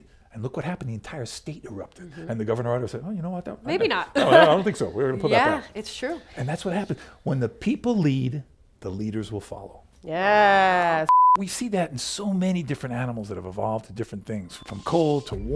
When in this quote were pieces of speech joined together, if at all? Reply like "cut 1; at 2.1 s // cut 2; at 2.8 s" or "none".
cut 1; at 11.3 s // cut 2; at 14.6 s